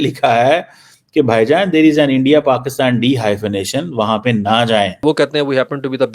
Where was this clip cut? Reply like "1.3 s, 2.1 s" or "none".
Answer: 5.0 s